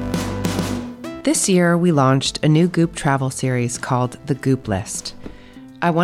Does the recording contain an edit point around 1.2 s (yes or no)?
yes